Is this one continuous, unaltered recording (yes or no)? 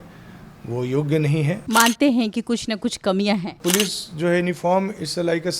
no